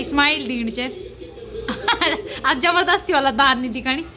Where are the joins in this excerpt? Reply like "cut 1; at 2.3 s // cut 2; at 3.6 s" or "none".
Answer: none